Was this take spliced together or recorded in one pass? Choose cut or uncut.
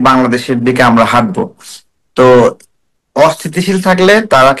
uncut